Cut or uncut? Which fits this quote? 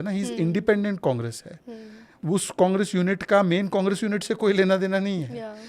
cut